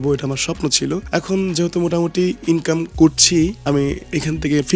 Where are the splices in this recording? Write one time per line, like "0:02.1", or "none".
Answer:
0:01.0
0:03.6